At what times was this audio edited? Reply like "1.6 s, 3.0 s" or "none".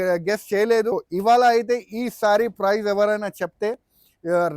0.9 s